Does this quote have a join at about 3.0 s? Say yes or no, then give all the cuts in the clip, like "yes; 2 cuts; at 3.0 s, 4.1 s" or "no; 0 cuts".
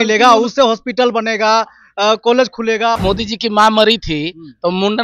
yes; 1 cut; at 3.0 s